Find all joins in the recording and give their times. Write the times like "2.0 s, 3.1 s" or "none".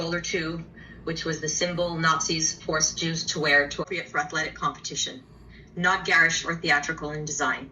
3.9 s